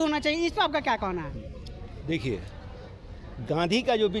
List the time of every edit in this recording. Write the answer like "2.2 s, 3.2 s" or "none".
none